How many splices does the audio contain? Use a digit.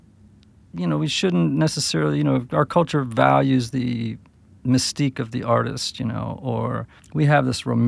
1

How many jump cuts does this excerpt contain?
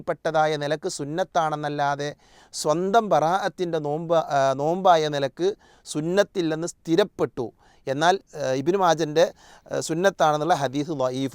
1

